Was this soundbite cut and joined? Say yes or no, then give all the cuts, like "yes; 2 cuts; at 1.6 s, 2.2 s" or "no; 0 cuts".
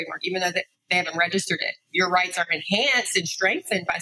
no; 0 cuts